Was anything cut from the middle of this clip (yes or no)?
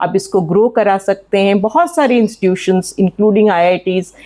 no